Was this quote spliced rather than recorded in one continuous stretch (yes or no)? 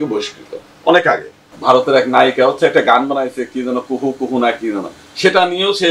yes